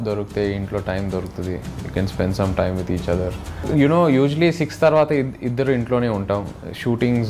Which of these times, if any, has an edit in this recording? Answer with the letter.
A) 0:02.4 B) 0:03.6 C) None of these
B